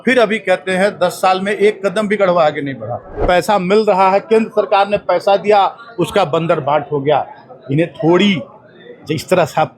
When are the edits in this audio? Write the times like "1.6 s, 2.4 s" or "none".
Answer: 3.1 s